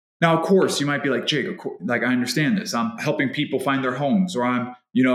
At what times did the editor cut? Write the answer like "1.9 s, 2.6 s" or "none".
3.0 s